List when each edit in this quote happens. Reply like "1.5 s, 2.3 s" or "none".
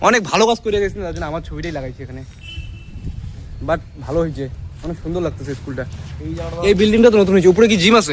none